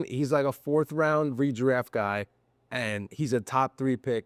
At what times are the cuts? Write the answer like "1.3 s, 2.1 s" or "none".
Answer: none